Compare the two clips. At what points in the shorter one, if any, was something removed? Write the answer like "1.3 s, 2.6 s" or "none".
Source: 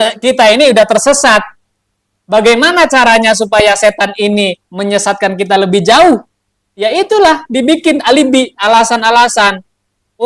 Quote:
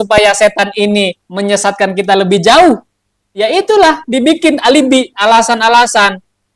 none

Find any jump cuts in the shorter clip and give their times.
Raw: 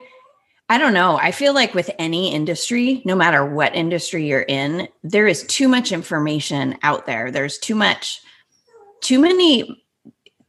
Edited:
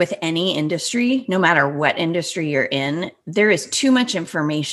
none

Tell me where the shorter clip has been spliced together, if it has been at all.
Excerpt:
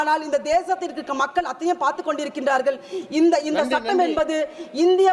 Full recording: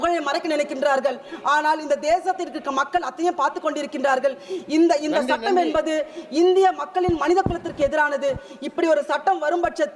none

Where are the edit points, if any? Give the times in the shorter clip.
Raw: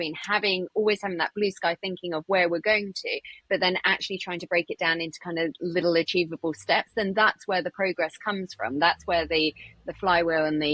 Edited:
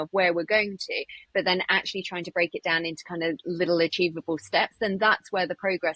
none

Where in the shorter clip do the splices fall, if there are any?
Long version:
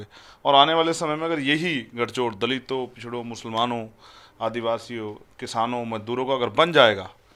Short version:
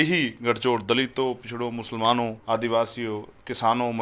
2.4 s

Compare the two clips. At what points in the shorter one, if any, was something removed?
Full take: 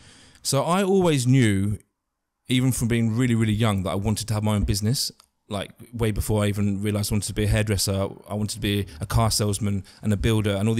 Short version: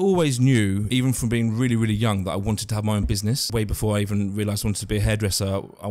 0.8 s, 3.4 s

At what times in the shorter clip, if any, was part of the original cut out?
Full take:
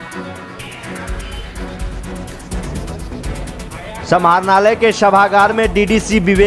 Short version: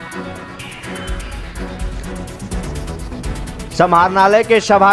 3.8 s

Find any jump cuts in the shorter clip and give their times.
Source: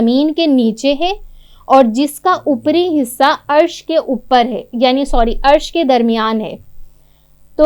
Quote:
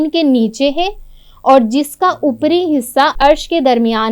3.2 s

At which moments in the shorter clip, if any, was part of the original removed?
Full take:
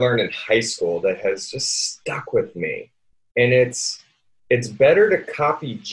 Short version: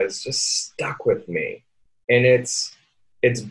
none

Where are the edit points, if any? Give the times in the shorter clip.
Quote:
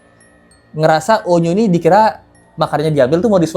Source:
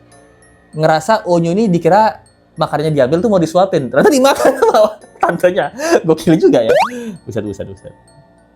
none

